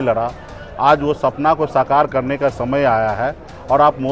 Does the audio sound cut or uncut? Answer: uncut